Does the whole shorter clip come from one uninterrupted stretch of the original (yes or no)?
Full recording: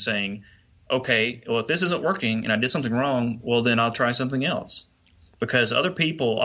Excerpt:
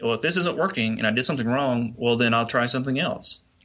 yes